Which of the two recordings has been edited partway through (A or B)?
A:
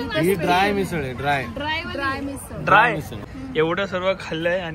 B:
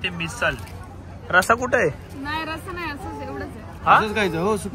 A